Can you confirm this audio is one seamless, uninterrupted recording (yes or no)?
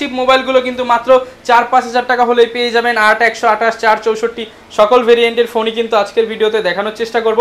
yes